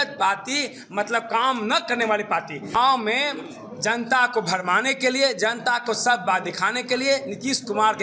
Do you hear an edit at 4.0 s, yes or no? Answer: no